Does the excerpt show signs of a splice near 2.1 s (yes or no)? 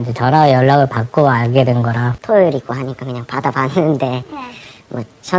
yes